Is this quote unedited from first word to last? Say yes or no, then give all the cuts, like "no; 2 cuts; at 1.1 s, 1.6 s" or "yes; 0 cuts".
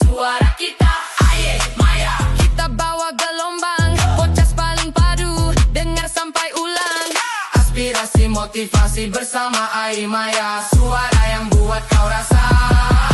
yes; 0 cuts